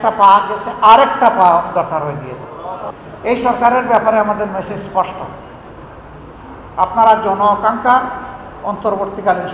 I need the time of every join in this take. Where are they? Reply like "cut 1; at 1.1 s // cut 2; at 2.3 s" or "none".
cut 1; at 2.9 s